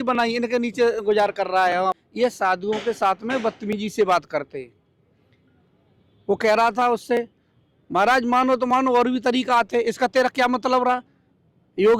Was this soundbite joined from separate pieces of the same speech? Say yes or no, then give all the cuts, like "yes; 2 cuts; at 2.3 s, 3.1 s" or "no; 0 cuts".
yes; 1 cut; at 2.0 s